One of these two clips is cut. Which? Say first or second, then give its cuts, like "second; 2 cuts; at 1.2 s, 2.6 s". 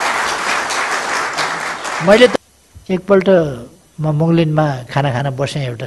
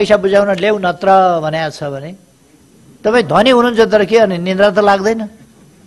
first; 1 cut; at 2.3 s